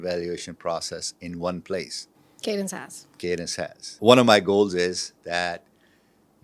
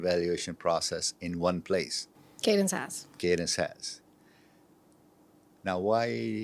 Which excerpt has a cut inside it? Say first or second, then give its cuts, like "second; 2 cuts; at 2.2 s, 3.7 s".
first; 1 cut; at 4.0 s